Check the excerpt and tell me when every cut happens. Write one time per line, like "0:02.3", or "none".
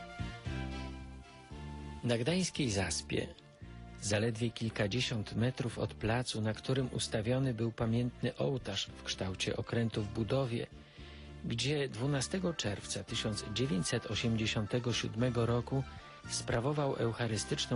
none